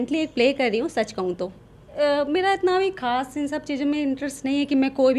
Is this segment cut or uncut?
cut